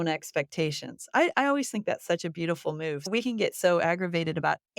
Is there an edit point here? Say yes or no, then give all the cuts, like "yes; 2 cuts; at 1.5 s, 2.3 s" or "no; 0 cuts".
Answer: yes; 1 cut; at 3.1 s